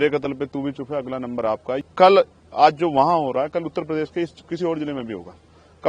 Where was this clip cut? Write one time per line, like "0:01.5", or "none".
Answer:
0:01.8